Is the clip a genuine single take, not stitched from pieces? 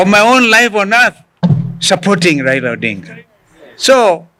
yes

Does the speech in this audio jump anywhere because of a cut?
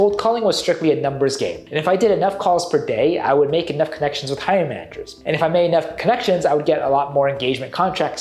no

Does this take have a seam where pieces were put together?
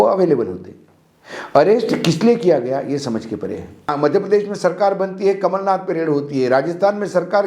yes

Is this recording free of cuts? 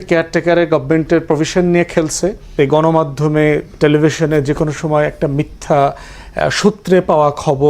no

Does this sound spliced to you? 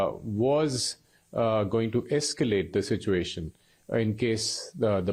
no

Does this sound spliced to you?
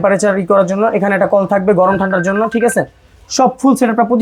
no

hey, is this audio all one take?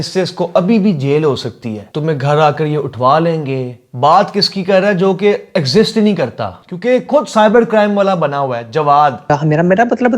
no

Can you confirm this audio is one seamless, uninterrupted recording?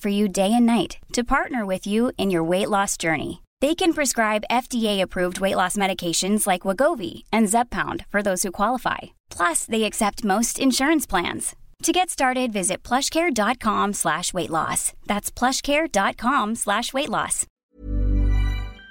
no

